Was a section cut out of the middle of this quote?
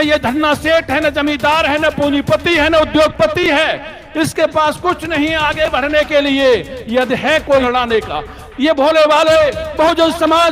yes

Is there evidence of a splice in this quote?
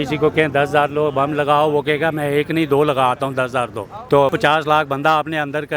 yes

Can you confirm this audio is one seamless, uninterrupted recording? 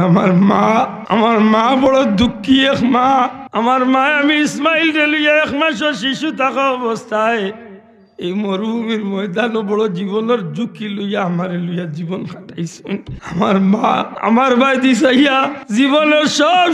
no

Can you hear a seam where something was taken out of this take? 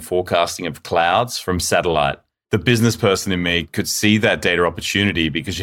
yes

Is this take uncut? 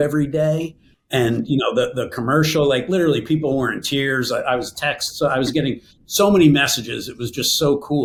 yes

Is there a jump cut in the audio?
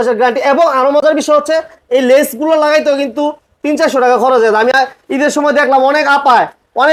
no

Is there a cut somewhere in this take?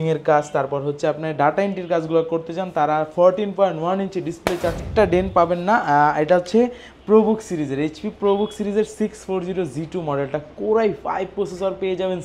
yes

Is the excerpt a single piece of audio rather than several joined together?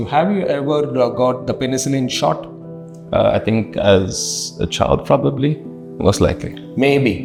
yes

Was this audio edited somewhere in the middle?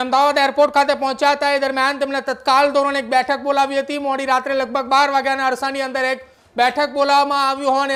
no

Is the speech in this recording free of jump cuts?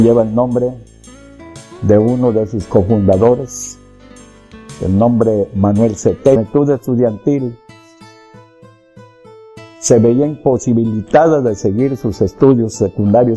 yes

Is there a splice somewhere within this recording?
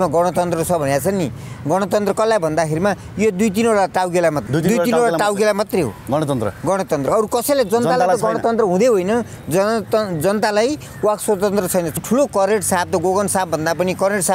yes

